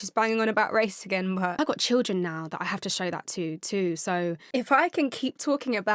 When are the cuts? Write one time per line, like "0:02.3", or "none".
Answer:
0:01.5
0:04.4